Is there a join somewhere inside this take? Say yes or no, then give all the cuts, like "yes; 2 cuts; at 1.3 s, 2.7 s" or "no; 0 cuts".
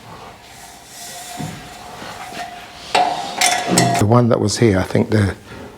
yes; 1 cut; at 4.0 s